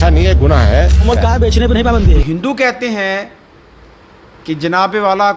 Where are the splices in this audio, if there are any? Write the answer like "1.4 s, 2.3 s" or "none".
2.2 s

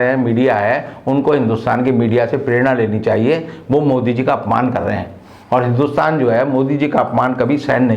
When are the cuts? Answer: none

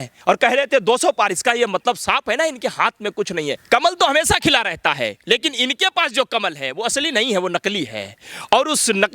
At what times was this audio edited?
3.6 s

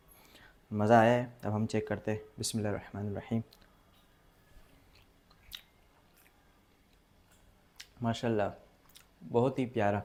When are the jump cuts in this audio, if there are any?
none

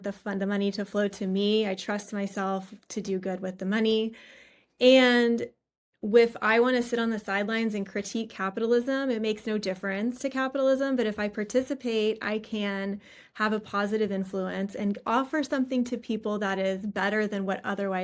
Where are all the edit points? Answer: none

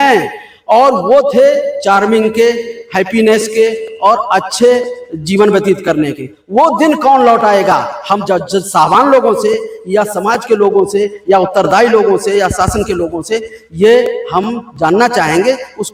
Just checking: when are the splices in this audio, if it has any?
none

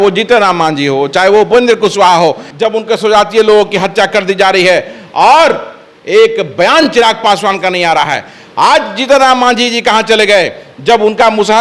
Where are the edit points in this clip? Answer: 2.5 s

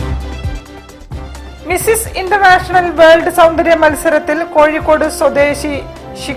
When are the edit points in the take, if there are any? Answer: 1.3 s

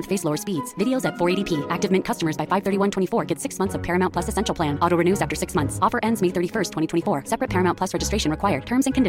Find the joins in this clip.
none

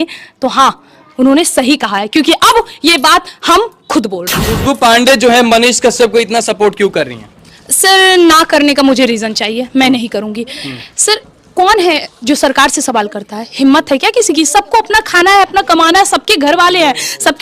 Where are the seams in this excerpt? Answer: 4.4 s

